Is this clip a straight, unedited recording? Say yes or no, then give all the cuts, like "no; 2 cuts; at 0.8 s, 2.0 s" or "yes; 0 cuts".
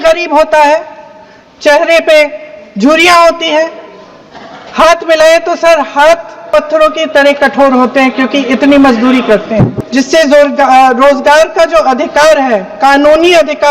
no; 1 cut; at 9.8 s